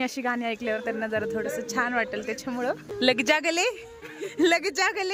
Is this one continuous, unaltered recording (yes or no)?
no